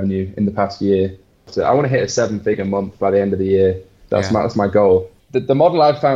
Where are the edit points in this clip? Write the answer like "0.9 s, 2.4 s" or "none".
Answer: 1.5 s, 5.2 s